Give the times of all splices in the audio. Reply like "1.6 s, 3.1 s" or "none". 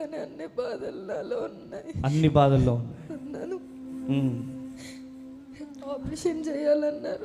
none